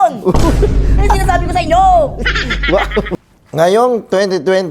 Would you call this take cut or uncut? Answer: cut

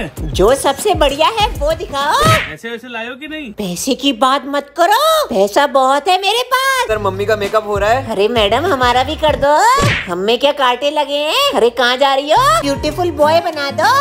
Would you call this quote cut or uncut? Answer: cut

